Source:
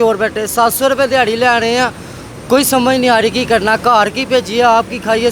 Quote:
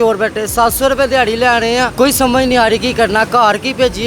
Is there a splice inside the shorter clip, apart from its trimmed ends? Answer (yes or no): yes